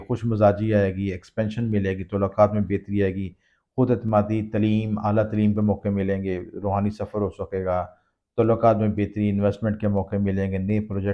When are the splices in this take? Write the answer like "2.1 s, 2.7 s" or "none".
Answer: none